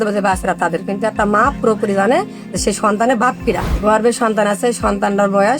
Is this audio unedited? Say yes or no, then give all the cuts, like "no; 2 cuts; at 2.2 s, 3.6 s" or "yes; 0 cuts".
no; 1 cut; at 3.7 s